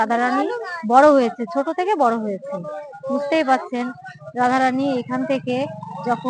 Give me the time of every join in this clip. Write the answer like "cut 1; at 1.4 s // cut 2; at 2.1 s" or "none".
none